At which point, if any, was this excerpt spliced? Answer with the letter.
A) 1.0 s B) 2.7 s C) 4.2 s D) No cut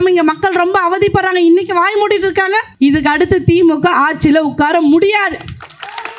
B